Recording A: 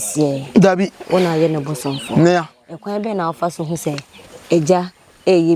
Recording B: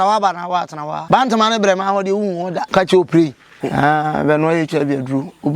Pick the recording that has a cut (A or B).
B